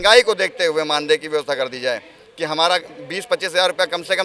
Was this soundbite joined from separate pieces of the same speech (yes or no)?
no